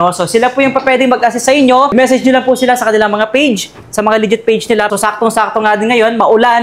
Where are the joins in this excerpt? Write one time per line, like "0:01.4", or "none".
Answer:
0:01.9
0:04.9